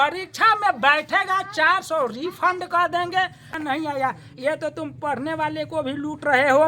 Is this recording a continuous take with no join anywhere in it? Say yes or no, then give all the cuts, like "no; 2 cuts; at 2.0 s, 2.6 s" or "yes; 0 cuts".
no; 1 cut; at 3.5 s